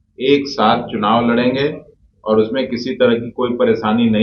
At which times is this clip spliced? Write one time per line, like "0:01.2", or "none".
none

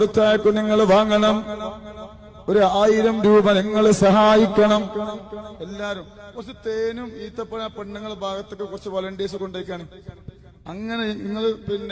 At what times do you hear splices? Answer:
none

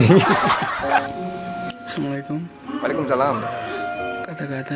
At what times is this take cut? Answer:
0:01.0

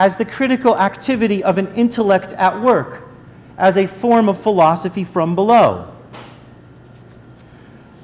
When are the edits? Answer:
0:02.1

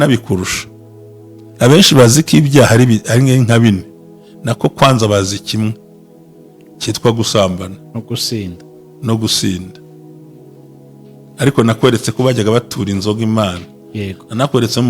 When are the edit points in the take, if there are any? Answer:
0:09.9
0:11.4

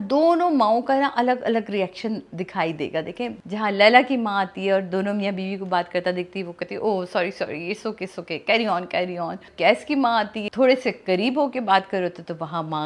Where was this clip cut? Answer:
0:03.4
0:09.5
0:10.4

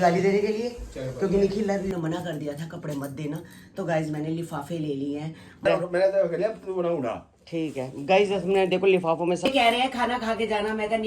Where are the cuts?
0:01.9
0:05.7
0:09.4

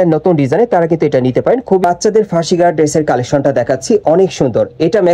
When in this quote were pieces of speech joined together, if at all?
0:01.8

